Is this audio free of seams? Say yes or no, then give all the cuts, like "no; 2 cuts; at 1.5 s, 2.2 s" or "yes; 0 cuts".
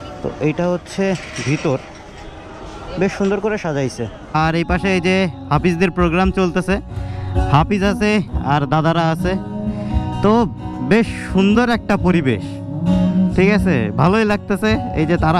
no; 1 cut; at 4.3 s